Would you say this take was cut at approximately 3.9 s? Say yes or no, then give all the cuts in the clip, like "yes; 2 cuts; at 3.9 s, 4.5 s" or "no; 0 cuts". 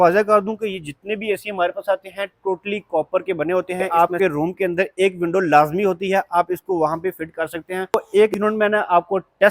yes; 2 cuts; at 3.9 s, 8.0 s